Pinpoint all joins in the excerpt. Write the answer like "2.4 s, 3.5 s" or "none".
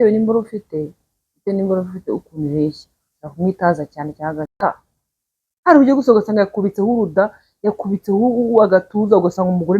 4.5 s